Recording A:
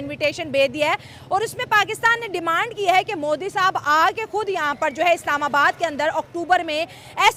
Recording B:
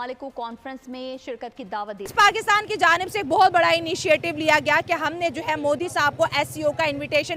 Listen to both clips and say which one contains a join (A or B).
B